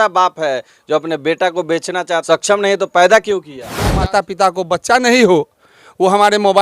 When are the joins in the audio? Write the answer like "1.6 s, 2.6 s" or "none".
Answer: 2.2 s, 3.9 s